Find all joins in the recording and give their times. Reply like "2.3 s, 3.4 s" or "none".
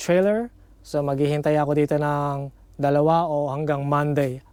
none